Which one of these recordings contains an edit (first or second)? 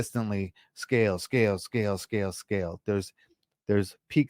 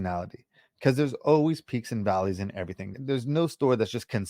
second